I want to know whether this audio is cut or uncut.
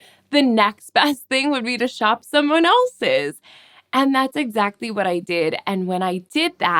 uncut